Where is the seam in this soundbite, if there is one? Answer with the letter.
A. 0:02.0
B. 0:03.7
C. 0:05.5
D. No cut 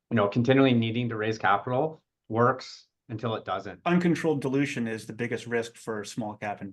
B